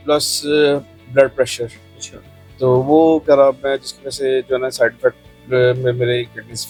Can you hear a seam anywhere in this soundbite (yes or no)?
no